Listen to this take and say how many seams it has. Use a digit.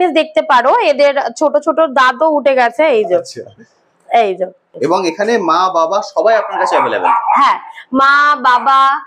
1